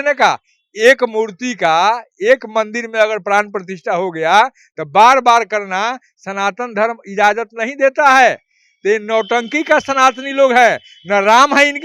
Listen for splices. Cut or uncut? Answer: uncut